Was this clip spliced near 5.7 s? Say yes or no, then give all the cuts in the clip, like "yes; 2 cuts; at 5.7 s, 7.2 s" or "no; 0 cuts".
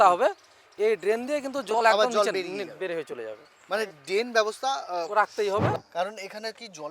yes; 1 cut; at 5.7 s